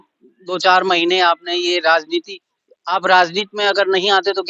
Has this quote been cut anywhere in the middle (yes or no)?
no